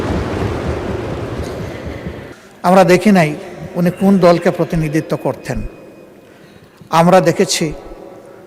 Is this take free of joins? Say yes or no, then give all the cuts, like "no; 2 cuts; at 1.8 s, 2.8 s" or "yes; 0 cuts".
no; 1 cut; at 2.3 s